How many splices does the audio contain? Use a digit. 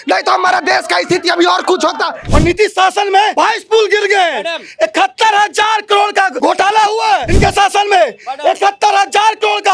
4